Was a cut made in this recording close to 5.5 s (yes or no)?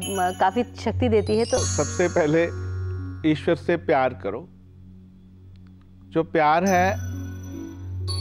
no